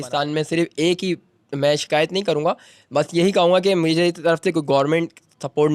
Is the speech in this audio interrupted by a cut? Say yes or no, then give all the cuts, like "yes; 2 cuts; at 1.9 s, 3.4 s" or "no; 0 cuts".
no; 0 cuts